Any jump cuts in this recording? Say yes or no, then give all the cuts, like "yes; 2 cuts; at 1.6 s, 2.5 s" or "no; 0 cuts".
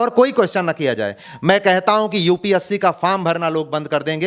yes; 1 cut; at 1.2 s